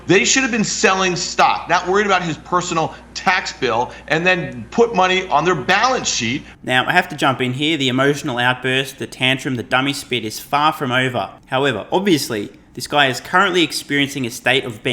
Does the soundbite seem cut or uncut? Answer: uncut